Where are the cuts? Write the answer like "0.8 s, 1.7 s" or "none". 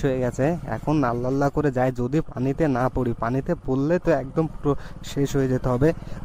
none